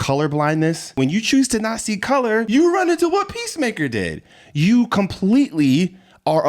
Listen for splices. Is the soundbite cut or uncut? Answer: cut